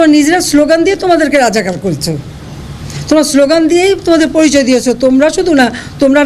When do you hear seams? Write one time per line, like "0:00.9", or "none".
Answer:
none